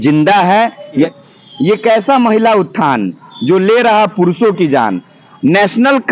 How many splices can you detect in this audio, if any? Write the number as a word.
one